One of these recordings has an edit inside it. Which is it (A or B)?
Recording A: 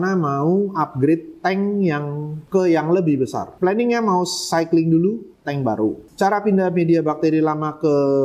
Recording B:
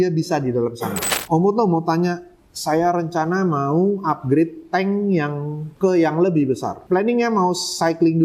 B